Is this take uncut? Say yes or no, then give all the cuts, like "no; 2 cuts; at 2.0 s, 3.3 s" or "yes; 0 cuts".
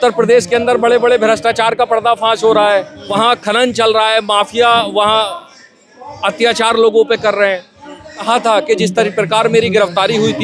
no; 2 cuts; at 3.0 s, 8.2 s